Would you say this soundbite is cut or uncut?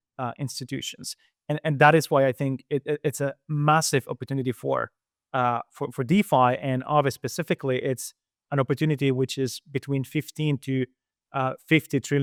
uncut